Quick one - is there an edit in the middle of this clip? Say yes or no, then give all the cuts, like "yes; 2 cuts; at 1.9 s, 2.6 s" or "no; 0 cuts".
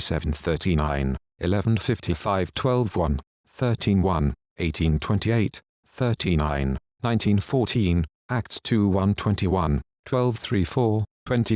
yes; 1 cut; at 4.5 s